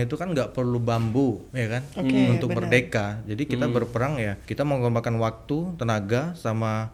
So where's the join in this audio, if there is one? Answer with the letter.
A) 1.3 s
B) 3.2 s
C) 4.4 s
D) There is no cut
C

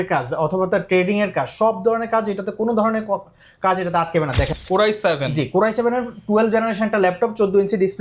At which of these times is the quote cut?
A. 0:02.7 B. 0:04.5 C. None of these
B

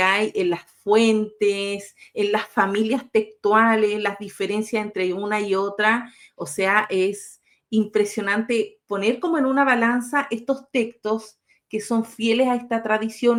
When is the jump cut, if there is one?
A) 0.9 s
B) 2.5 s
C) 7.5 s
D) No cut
D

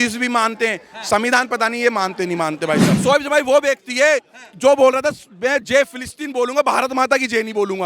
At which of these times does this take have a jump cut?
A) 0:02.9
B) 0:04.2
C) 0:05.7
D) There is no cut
A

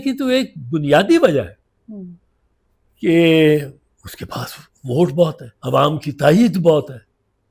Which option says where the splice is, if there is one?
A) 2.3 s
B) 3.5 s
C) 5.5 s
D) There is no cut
C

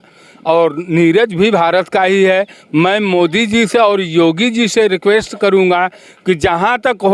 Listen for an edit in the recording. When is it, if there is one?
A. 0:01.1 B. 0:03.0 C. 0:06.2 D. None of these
D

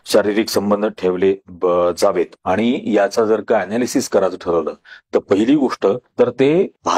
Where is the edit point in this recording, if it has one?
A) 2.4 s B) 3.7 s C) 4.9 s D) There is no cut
A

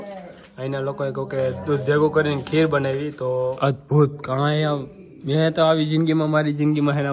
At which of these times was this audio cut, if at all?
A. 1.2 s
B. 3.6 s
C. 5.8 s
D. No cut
B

